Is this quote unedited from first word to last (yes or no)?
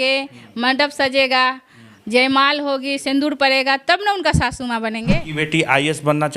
no